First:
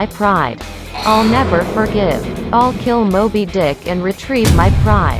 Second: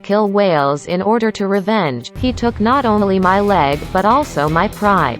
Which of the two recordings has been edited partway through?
second; 1 cut; at 2.1 s

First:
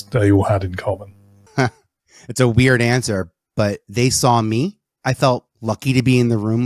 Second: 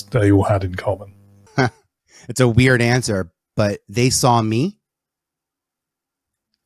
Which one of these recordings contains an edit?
first; 2 cuts; at 4.9 s, 5.5 s

